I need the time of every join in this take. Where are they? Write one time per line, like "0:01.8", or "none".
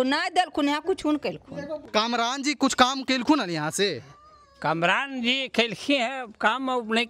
0:01.8